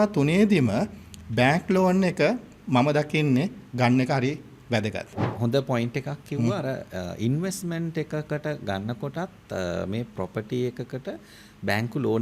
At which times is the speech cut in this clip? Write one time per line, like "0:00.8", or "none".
0:05.2